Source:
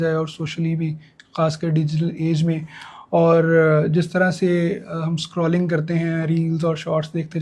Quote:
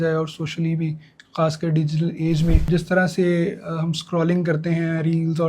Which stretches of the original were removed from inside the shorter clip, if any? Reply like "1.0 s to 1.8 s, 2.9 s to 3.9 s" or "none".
2.6 s to 3.9 s